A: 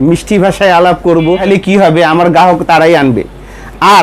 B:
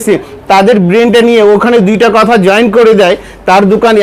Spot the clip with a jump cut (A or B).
A